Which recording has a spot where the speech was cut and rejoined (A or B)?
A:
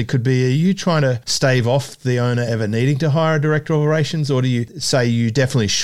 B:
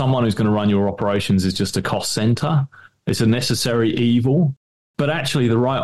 A